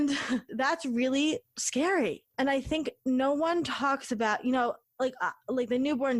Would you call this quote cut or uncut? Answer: cut